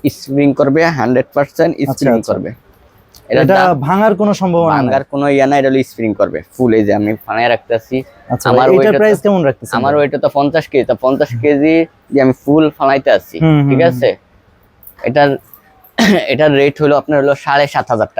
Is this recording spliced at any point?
yes; 1 cut; at 12.0 s

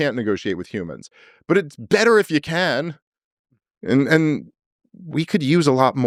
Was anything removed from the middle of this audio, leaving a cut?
no; 0 cuts

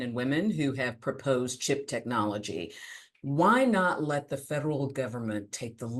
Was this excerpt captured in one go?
yes; 0 cuts

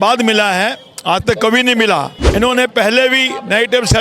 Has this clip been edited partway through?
yes; 1 cut; at 2.2 s

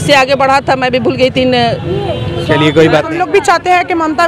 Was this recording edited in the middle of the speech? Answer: yes; 1 cut; at 3.2 s

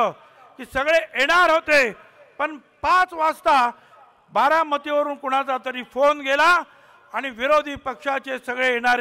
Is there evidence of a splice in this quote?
no; 0 cuts

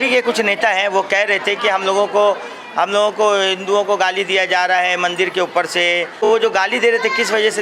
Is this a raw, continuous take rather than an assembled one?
no; 1 cut; at 6.1 s

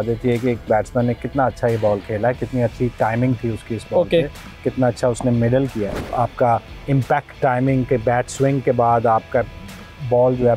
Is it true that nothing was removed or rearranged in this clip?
no; 1 cut; at 6.0 s

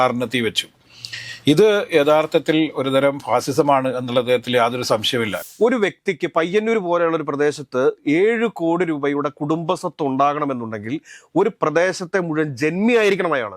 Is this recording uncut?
no; 1 cut; at 5.4 s

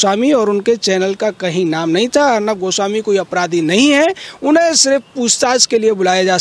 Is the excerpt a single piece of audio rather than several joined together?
yes; 0 cuts

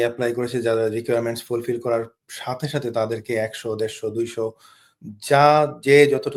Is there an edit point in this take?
no; 0 cuts

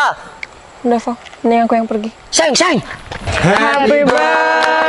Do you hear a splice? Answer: yes; 1 cut; at 3.4 s

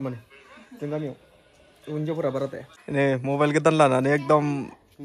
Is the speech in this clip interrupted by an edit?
yes; 1 cut; at 2.7 s

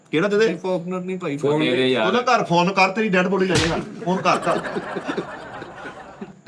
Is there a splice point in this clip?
no; 0 cuts

